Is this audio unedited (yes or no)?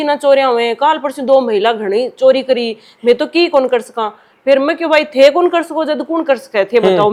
yes